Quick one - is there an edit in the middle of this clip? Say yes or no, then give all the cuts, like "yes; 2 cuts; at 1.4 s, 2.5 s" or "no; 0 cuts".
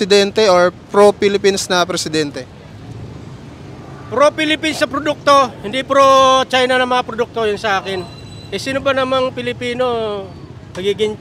no; 0 cuts